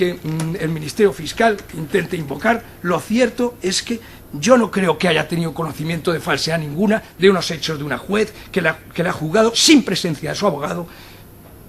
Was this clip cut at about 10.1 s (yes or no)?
yes